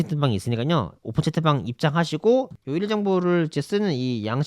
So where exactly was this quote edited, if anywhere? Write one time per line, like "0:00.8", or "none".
0:02.6